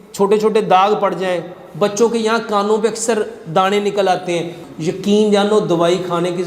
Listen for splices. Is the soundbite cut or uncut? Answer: cut